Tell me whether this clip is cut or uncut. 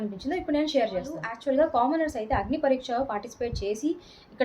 cut